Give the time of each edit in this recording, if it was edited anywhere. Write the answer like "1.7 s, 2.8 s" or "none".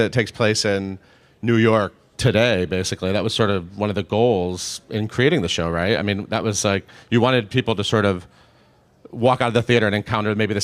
4.1 s